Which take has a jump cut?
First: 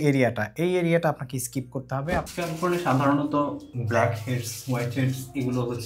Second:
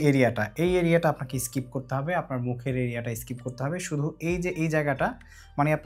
first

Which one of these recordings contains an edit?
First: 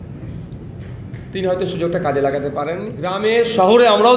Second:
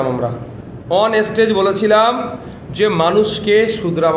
first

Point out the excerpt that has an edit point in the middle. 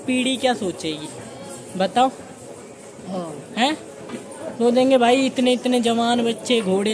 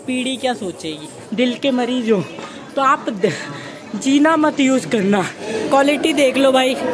second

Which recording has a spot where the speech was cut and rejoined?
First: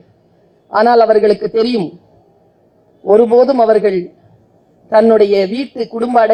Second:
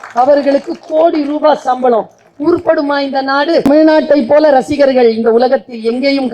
second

